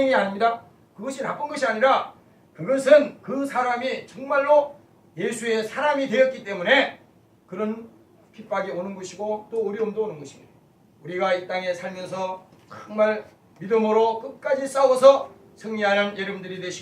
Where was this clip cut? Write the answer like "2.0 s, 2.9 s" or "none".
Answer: 7.9 s